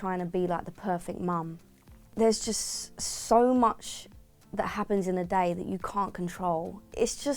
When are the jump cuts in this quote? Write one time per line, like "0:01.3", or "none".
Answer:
0:02.1